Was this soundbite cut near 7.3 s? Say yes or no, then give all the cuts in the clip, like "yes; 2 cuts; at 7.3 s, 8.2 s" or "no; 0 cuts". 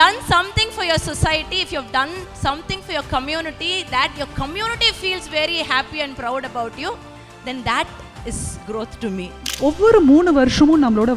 no; 1 cut; at 9.4 s